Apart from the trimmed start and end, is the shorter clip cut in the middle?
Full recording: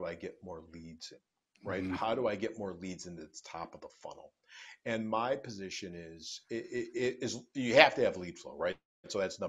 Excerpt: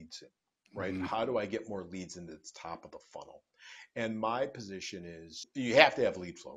yes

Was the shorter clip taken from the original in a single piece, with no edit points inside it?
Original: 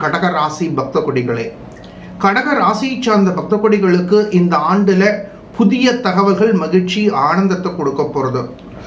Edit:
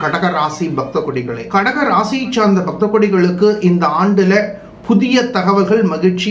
no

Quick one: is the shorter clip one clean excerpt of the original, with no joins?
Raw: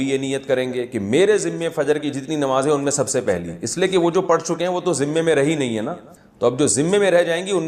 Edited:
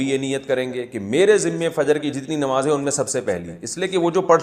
yes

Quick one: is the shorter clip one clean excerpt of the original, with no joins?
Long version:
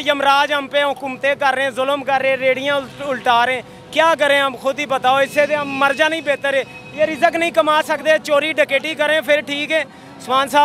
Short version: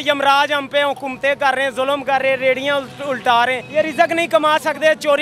no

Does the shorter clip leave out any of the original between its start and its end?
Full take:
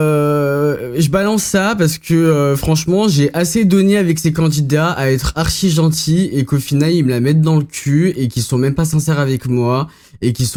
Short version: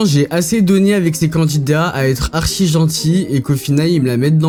no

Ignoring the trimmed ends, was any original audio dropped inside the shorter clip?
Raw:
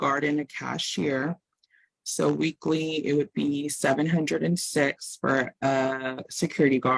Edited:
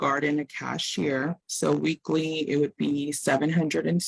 yes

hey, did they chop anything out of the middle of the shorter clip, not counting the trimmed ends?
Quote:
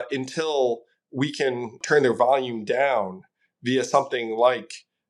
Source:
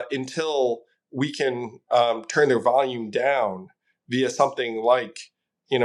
yes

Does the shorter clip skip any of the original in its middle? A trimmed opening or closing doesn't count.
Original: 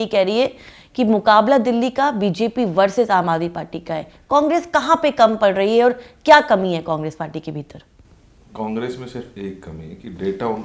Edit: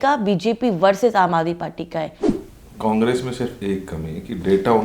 yes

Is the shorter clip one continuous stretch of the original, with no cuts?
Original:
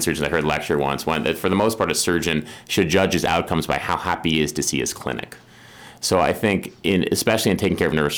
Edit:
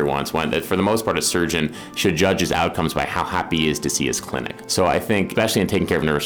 no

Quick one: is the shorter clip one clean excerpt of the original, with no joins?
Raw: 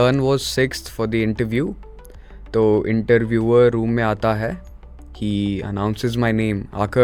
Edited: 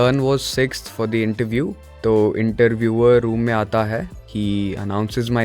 no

